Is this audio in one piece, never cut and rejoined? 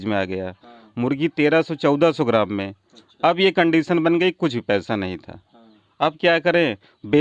yes; 0 cuts

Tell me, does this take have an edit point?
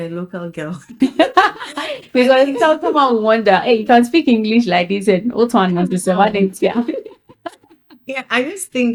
no; 0 cuts

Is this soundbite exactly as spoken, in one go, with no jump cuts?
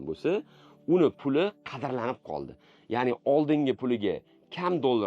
yes; 0 cuts

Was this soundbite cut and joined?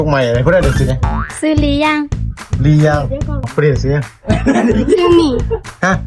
yes; 1 cut; at 3.5 s

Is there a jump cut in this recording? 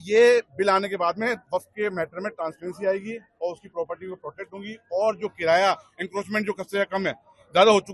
no; 0 cuts

